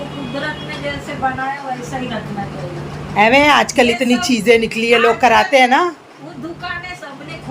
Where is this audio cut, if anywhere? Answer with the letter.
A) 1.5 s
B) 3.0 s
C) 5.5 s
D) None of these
B